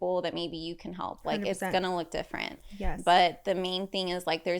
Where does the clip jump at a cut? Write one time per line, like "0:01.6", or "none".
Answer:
none